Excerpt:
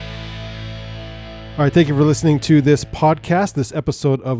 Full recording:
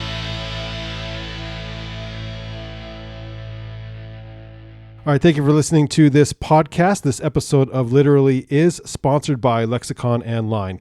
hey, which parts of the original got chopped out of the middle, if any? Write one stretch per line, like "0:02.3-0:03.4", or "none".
0:03.1-0:05.0